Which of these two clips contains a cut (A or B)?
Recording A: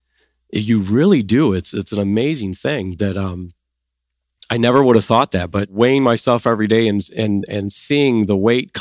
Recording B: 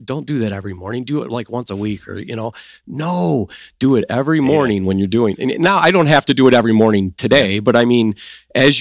A